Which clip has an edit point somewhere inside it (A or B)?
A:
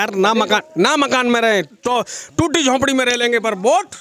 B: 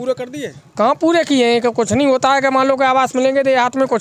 A